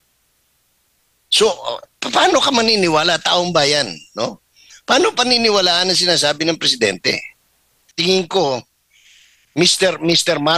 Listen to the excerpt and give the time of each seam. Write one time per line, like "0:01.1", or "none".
0:07.9